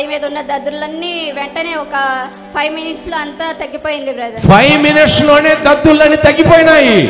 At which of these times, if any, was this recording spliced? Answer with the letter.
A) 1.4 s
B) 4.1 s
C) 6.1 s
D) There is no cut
D